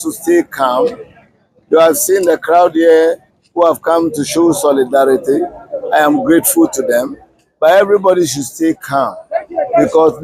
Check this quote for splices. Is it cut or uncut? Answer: uncut